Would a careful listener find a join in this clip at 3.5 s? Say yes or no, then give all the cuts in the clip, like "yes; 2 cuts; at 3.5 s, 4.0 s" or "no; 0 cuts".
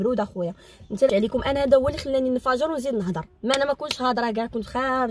no; 1 cut; at 1.1 s